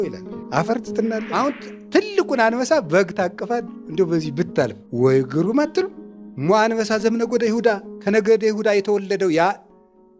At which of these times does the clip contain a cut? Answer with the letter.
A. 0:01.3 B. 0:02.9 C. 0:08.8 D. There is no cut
A